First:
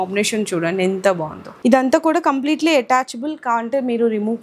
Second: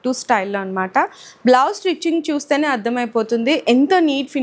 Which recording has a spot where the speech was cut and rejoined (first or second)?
first